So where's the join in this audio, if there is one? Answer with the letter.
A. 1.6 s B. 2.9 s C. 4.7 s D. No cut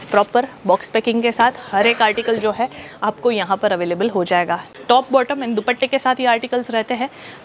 C